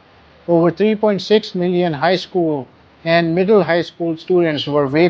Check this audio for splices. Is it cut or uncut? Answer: uncut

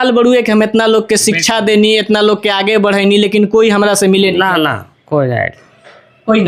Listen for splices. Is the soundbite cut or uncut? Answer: uncut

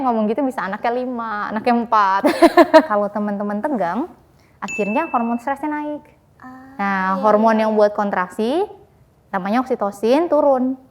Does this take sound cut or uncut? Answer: cut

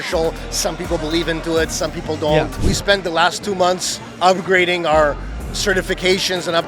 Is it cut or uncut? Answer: cut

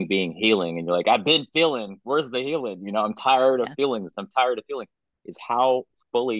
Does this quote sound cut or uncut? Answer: uncut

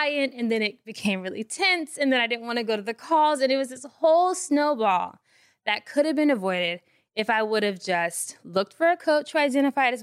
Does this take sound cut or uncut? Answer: uncut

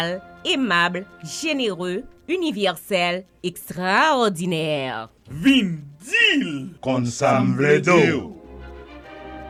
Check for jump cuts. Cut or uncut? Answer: uncut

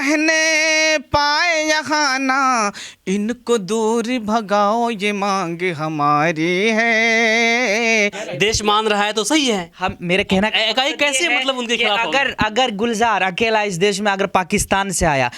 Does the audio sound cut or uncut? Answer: cut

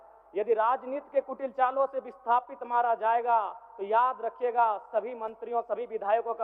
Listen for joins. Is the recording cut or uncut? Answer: uncut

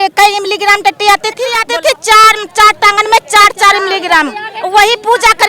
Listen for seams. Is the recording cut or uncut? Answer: cut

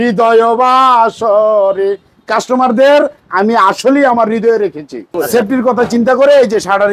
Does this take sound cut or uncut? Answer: cut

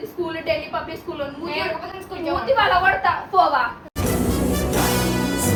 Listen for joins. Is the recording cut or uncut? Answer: uncut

